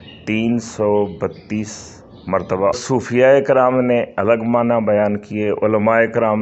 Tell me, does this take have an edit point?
yes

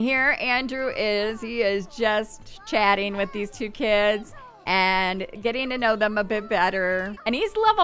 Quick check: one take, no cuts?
yes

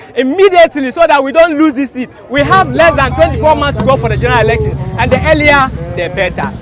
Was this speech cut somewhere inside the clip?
no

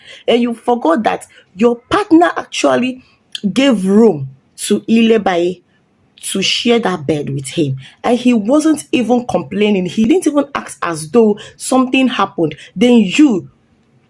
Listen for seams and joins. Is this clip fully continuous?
no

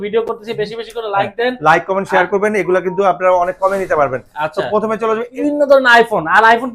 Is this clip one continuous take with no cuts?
no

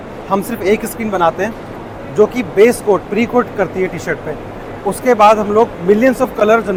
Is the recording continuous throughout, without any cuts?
yes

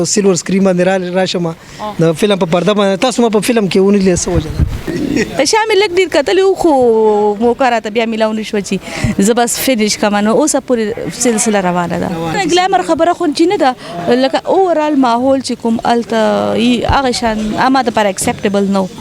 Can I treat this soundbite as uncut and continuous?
no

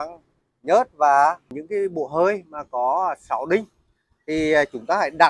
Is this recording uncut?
no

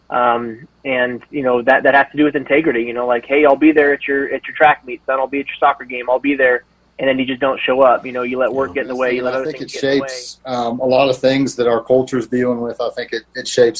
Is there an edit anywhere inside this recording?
yes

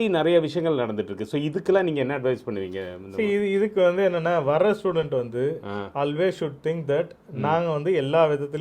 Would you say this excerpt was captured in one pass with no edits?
yes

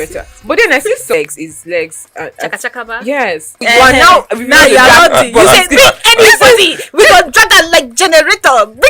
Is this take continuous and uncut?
no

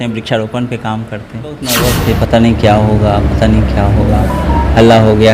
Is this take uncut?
no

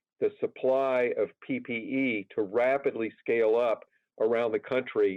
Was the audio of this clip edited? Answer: no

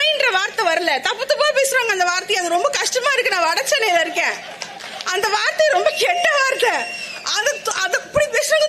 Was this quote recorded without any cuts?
yes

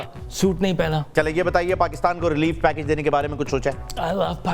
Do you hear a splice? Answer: yes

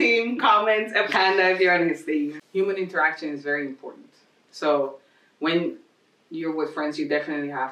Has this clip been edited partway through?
yes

